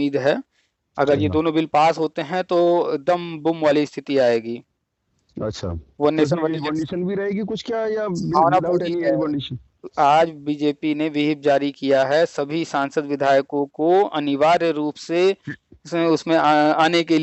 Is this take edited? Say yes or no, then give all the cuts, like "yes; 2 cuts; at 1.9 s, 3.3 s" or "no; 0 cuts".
no; 0 cuts